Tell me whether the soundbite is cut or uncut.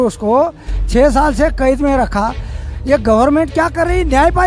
uncut